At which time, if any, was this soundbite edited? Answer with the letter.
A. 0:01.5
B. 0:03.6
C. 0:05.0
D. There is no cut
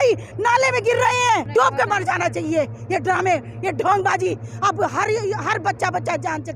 A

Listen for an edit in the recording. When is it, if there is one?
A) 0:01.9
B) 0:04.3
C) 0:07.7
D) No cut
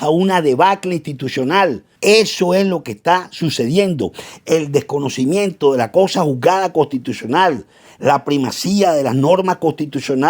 A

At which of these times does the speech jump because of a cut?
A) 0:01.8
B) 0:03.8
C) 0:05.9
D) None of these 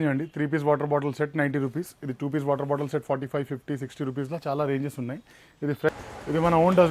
C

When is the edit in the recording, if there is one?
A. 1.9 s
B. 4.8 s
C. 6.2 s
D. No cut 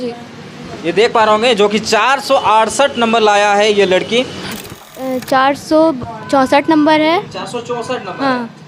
B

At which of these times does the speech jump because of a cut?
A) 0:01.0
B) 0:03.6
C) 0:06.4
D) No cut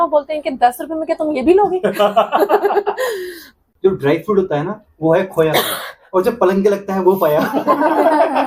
B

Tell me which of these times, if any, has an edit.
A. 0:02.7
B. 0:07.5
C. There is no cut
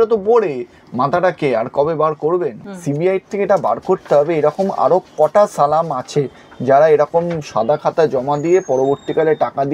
A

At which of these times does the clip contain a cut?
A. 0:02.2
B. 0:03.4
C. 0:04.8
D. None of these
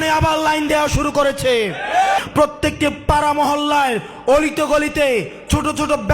A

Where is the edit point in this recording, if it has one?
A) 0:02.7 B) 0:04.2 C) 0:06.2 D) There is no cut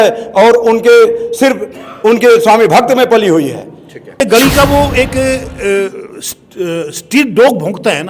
B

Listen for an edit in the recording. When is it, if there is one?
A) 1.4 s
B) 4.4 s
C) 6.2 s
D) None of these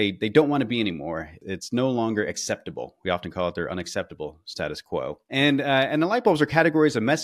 A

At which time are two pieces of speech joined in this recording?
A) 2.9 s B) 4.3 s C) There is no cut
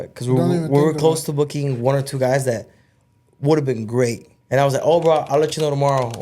B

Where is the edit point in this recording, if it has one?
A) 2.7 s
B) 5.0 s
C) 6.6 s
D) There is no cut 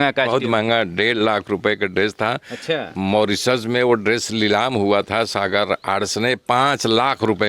D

